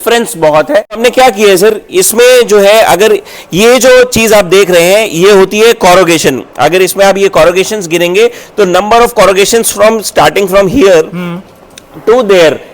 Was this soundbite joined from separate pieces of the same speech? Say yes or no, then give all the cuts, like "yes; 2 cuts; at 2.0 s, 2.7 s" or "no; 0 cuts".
yes; 1 cut; at 1.0 s